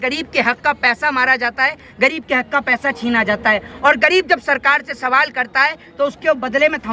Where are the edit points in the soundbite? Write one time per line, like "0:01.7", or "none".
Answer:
none